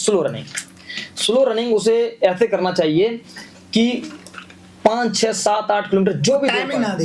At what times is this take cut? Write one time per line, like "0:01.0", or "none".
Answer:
none

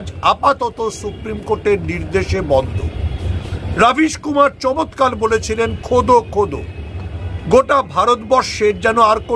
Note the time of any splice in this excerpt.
none

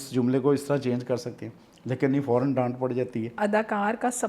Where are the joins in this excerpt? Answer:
0:03.4

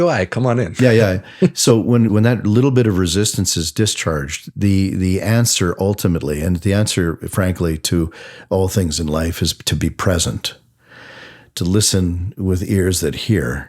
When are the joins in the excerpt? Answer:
0:02.1

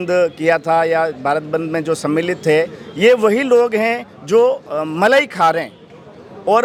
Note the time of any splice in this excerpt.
none

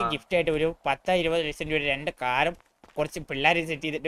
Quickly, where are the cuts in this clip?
none

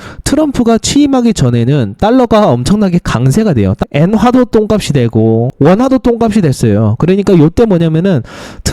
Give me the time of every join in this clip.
0:03.8
0:05.5

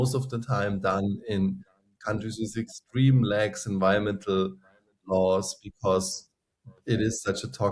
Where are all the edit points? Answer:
none

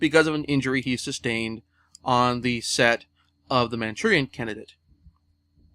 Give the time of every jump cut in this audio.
0:03.7

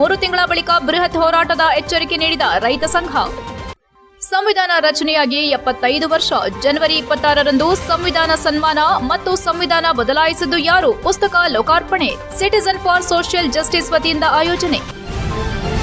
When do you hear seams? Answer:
0:14.9

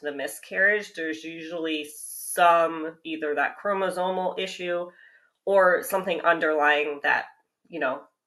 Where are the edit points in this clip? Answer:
none

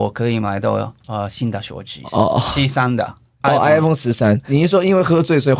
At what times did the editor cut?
0:02.0
0:03.3
0:04.4

